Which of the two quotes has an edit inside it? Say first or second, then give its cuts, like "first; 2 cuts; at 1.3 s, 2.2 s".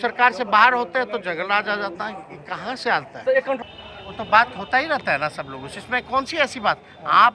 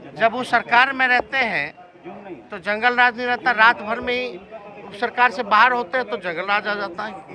first; 1 cut; at 3.6 s